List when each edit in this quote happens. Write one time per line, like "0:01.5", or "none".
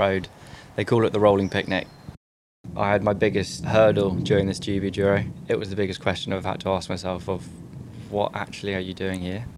0:02.4
0:03.6
0:05.3